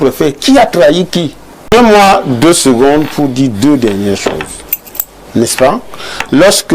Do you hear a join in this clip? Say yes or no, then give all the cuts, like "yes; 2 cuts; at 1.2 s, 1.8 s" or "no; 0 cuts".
yes; 1 cut; at 1.7 s